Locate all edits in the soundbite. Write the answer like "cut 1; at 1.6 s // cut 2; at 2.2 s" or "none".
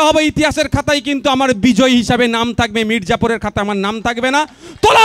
none